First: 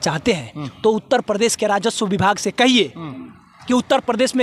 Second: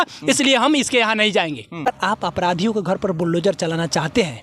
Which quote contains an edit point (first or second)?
second